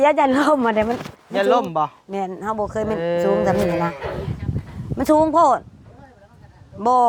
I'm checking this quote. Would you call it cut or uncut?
uncut